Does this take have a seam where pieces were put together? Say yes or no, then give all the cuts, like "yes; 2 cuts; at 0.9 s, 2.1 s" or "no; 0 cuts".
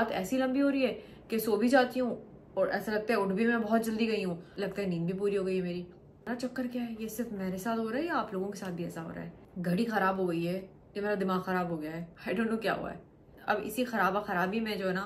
no; 0 cuts